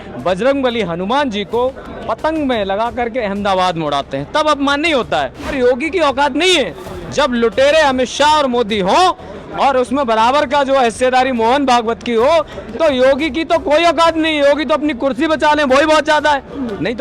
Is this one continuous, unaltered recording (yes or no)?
no